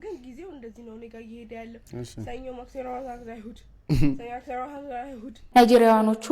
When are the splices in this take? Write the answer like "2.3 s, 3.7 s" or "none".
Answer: 5.3 s